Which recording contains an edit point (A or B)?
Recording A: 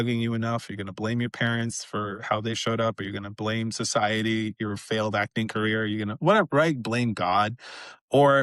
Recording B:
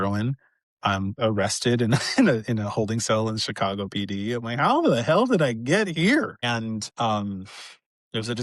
B